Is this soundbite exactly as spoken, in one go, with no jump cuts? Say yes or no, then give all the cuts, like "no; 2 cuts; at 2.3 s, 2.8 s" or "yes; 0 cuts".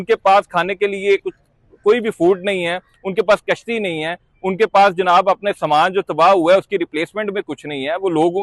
yes; 0 cuts